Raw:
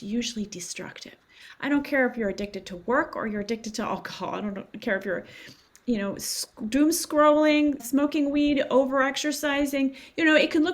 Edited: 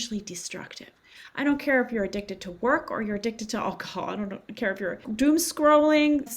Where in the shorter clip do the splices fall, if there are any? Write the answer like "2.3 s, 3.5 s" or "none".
5.0 s

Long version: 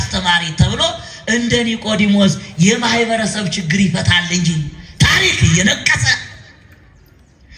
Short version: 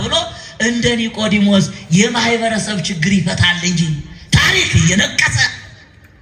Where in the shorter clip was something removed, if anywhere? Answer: none

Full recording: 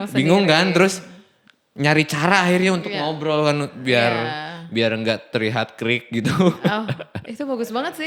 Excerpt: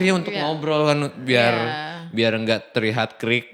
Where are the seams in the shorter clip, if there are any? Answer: none

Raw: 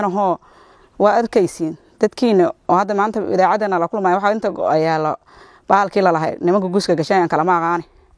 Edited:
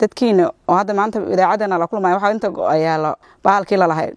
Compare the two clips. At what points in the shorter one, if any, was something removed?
3.2 s

